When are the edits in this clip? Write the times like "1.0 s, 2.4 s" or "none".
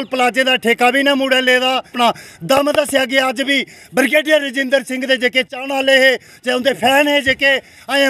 1.9 s